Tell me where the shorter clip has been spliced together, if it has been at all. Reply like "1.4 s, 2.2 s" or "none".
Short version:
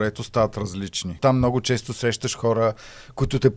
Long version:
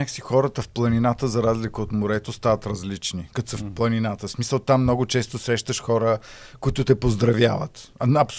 1.2 s